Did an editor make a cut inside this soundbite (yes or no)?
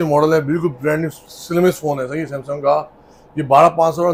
no